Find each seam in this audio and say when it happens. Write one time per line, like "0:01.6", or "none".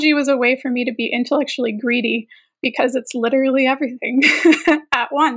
none